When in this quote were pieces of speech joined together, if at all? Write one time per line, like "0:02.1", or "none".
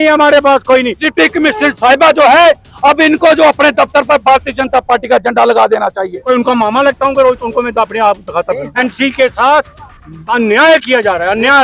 0:01.0
0:06.2
0:08.7

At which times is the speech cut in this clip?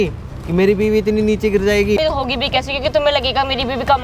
0:02.0

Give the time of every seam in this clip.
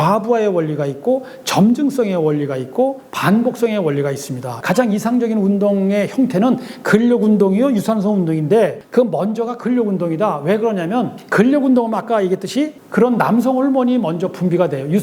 0:04.6

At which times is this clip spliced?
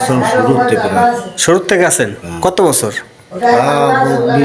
none

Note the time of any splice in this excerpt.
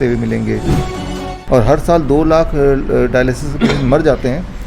0:01.1

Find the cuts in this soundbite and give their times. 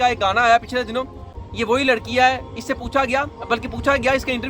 0:01.3

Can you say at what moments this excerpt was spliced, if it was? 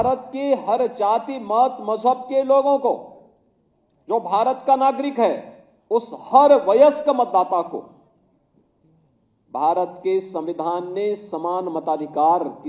none

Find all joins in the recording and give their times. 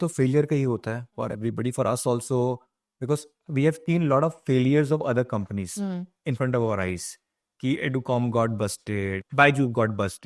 0:09.2

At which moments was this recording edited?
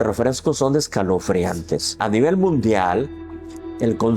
0:02.0

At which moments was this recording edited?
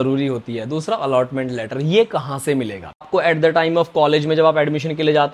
0:03.1

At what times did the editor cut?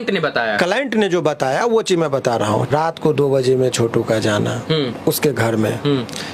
0:02.7

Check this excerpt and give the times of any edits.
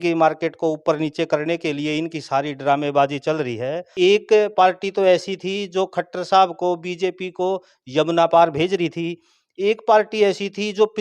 0:03.8

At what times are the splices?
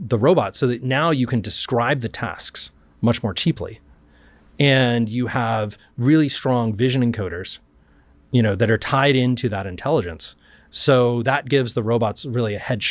none

